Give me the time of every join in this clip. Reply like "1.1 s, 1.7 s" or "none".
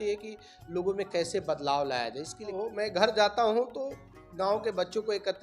2.5 s